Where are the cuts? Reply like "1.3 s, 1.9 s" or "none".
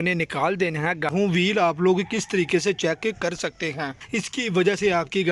1.1 s, 3.9 s